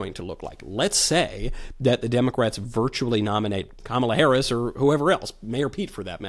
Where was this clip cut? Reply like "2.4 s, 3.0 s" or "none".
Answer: 3.7 s